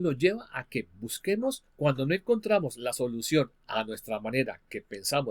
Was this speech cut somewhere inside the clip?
yes; 1 cut; at 1.7 s

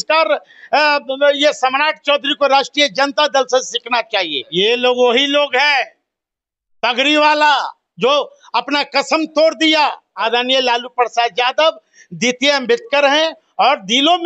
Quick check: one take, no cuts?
no; 2 cuts; at 4.4 s, 10.1 s

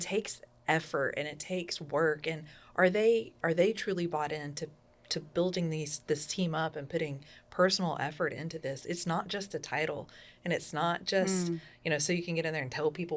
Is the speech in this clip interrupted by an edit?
no; 0 cuts

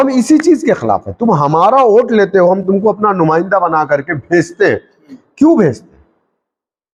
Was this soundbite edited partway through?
no; 0 cuts

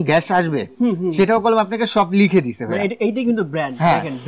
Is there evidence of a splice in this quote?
no; 0 cuts

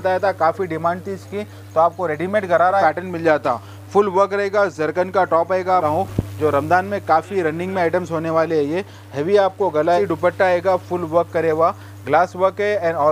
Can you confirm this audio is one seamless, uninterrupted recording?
no; 3 cuts; at 2.8 s, 5.8 s, 10.0 s

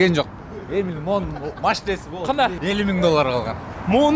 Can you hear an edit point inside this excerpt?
yes; 1 cut; at 2.6 s

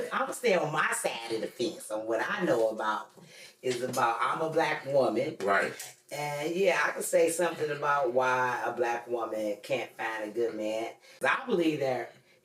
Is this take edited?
yes; 1 cut; at 11.1 s

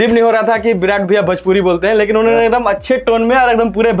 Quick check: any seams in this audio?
no; 0 cuts

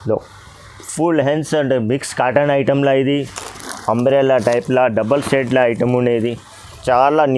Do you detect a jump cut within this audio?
yes; 1 cut; at 3.7 s

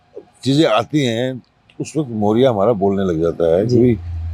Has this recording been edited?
no; 0 cuts

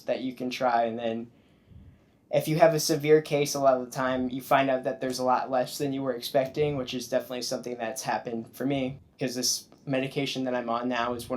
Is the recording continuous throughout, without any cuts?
yes; 0 cuts

